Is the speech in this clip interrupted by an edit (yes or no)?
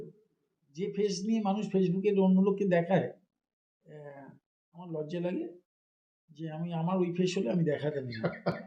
no